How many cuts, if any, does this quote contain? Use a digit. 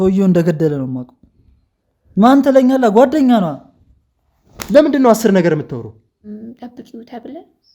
1